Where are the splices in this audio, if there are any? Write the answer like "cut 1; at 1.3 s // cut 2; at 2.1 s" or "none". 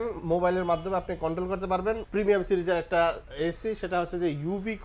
cut 1; at 2.0 s // cut 2; at 3.3 s